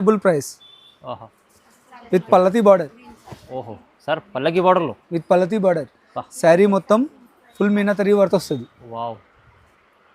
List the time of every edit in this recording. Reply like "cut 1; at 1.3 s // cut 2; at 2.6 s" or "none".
cut 1; at 1.4 s